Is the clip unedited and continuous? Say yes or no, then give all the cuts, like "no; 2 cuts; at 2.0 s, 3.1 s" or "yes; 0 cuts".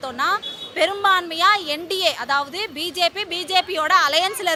yes; 0 cuts